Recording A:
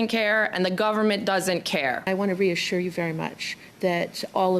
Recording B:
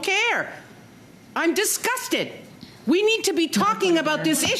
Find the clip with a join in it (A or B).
A